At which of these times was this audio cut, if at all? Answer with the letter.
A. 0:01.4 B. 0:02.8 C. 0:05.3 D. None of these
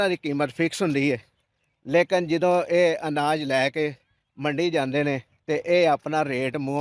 C